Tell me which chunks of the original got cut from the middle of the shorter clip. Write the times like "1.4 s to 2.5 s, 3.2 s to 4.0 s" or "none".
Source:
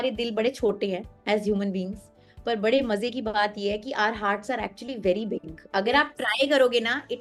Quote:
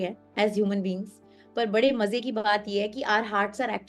none